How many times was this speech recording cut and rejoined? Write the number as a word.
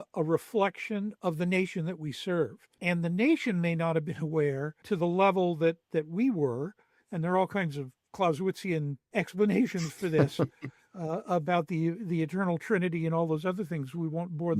four